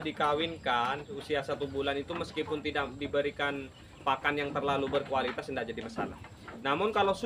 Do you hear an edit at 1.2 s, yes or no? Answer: yes